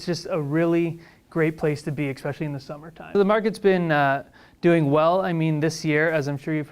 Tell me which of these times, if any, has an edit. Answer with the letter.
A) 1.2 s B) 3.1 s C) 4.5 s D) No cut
B